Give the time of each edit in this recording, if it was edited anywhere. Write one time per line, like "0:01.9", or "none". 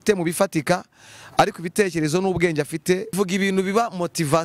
0:03.1